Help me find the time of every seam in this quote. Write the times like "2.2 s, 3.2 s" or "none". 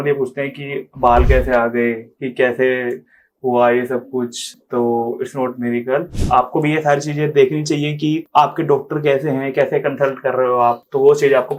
none